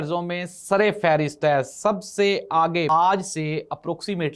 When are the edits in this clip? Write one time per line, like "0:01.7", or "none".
0:02.9